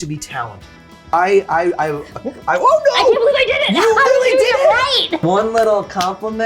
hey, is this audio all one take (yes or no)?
no